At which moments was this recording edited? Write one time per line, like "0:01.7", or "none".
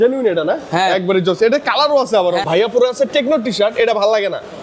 0:02.4

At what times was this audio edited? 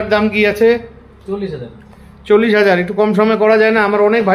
none

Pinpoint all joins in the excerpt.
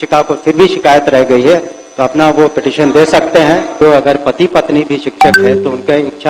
0:03.8

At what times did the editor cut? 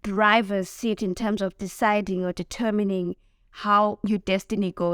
0:04.0

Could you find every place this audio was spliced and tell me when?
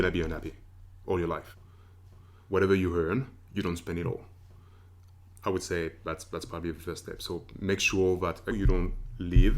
0:02.0
0:08.5

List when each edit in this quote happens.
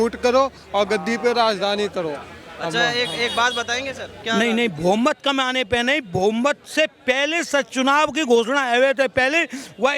0:04.2

